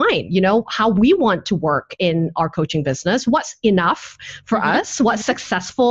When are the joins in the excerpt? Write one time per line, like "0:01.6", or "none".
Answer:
none